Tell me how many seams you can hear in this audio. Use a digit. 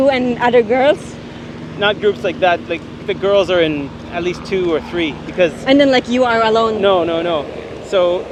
0